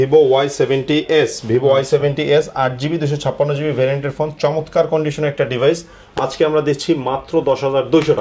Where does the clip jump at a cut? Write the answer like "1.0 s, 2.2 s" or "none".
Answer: none

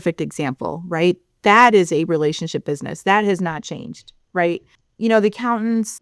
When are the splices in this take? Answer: none

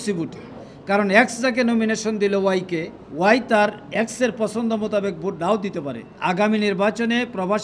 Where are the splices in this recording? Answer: 6.1 s

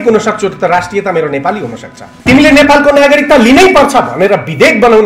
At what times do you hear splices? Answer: 2.1 s

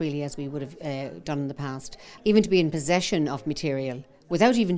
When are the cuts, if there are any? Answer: 2.1 s

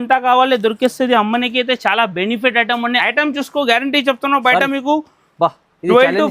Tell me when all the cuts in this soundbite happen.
3.0 s

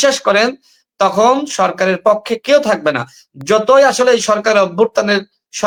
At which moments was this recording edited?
none

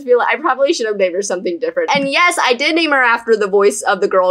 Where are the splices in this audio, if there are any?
1.9 s

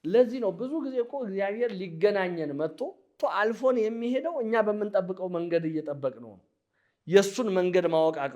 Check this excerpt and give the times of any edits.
3.1 s

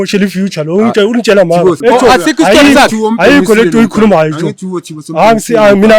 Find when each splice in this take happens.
1.8 s

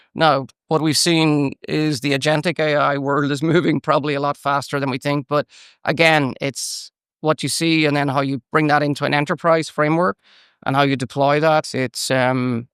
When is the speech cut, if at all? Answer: none

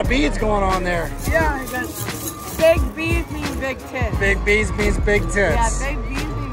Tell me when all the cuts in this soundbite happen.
none

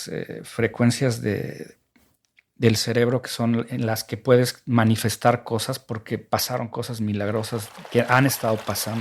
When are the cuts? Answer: none

